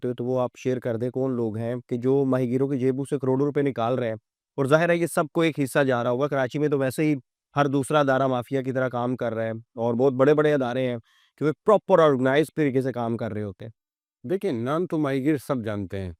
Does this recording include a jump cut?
no; 0 cuts

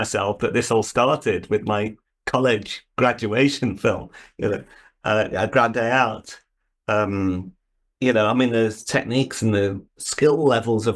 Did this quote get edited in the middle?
no; 0 cuts

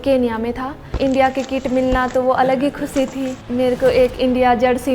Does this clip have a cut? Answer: yes; 2 cuts; at 0.9 s, 3.4 s

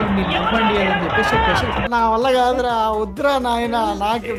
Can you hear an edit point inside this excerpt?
no; 0 cuts

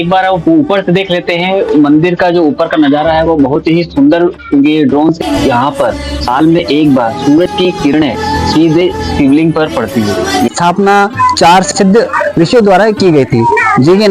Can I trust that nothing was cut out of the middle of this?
no; 2 cuts; at 5.2 s, 10.5 s

